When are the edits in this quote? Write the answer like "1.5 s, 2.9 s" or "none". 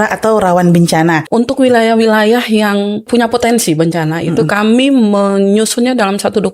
1.2 s, 3.1 s